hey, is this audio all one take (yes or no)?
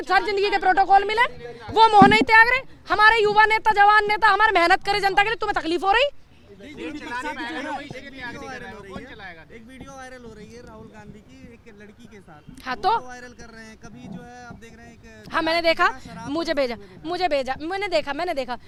yes